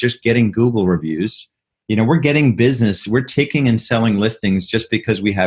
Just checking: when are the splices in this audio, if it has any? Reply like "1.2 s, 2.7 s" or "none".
none